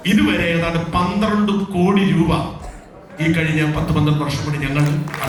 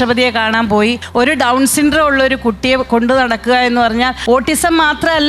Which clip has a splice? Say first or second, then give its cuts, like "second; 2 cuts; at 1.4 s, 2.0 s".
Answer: second; 2 cuts; at 1.0 s, 4.2 s